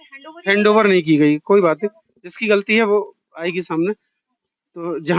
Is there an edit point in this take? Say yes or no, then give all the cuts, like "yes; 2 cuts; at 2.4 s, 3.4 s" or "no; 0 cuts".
no; 0 cuts